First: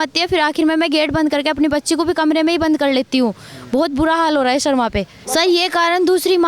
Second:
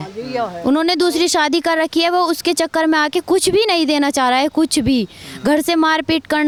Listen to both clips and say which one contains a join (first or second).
first